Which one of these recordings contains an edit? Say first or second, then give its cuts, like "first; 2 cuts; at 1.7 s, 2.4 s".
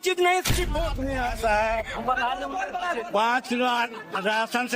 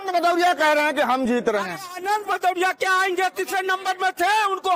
first; 1 cut; at 1.0 s